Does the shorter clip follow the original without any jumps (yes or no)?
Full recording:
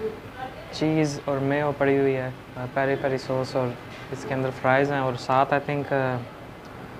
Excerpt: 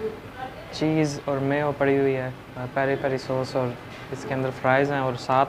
yes